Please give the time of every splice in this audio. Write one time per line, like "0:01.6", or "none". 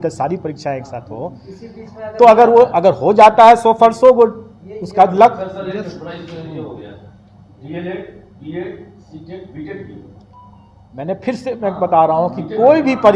none